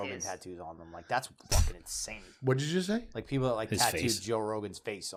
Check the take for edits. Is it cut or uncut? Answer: uncut